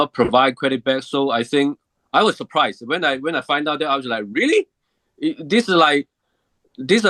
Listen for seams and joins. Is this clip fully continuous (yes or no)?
yes